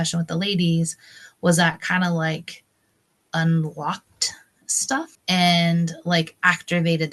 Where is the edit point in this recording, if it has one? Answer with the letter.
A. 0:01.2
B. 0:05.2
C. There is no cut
B